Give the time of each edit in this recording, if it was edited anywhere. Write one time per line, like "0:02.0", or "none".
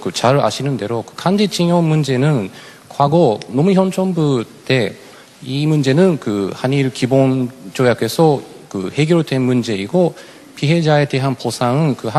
0:05.1